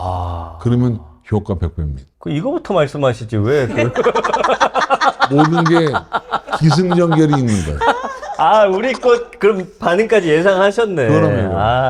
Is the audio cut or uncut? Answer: uncut